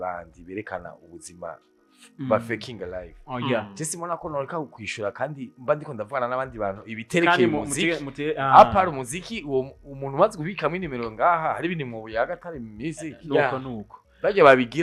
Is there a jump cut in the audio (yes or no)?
no